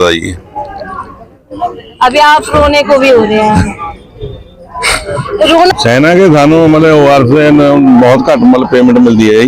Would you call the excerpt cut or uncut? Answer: cut